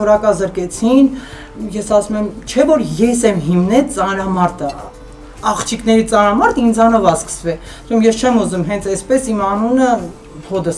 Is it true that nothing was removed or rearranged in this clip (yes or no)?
yes